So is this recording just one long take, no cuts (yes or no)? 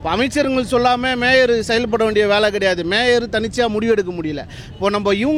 yes